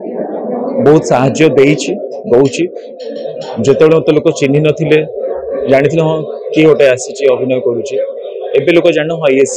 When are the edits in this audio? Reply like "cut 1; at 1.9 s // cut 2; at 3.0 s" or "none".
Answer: none